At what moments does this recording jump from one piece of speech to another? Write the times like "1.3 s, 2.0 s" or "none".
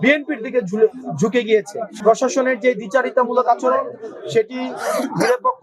1.8 s